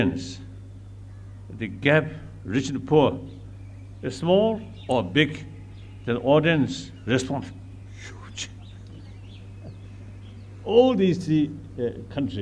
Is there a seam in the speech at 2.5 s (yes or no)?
no